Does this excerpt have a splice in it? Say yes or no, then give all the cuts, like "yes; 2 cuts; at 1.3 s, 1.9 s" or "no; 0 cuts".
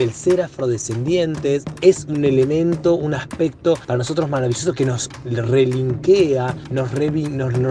yes; 4 cuts; at 2.0 s, 3.8 s, 5.2 s, 6.6 s